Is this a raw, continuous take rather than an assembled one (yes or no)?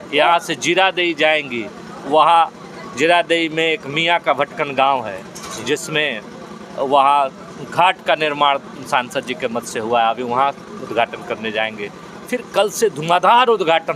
yes